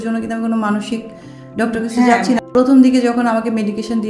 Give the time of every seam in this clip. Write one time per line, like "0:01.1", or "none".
0:02.4